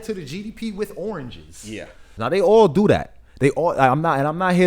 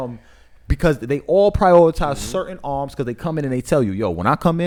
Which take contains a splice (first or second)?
first